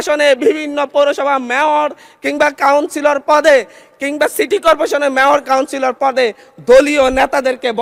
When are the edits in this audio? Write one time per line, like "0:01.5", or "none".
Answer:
none